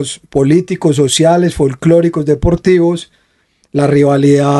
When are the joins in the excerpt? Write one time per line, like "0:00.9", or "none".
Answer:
none